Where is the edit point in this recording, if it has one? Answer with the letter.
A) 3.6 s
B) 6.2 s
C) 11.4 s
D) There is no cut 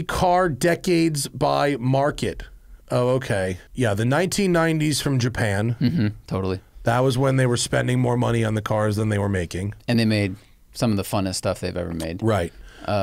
A